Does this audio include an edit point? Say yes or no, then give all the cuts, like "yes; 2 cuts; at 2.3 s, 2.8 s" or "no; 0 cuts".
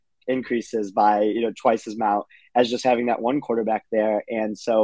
no; 0 cuts